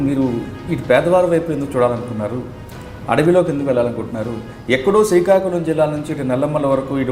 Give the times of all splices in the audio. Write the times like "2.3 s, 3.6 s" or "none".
none